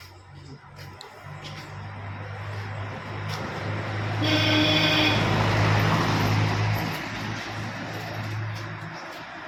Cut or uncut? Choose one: uncut